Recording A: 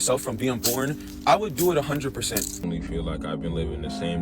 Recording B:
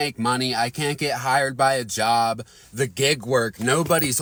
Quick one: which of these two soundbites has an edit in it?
A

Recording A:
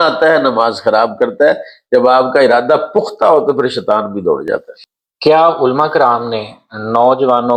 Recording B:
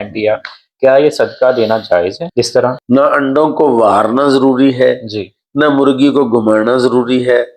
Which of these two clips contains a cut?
B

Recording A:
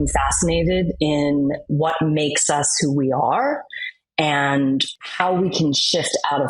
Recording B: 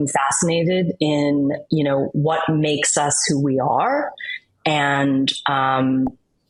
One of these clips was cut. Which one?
A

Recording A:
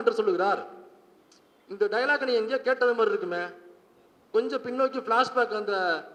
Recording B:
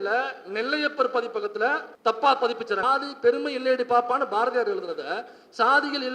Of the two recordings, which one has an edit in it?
B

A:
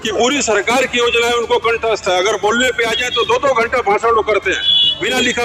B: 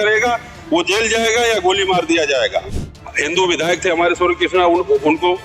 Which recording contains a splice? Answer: B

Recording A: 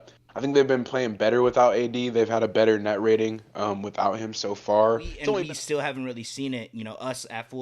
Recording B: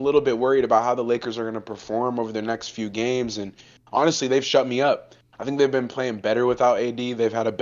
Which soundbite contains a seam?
A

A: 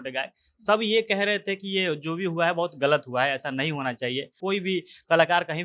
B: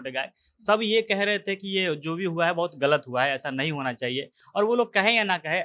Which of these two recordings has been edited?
A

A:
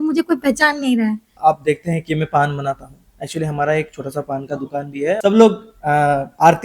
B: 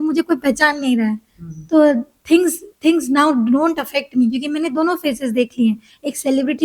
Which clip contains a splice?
A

